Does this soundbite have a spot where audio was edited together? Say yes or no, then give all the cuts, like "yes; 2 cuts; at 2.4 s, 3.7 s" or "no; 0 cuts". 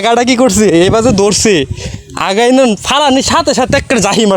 no; 0 cuts